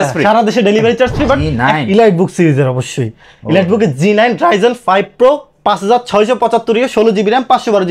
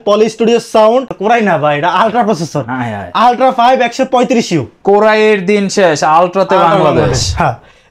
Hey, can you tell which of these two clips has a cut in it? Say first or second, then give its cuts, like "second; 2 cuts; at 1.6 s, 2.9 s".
first; 1 cut; at 1.5 s